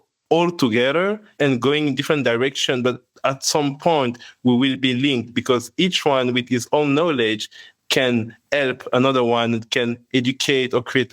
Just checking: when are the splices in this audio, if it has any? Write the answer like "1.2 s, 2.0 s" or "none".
1.2 s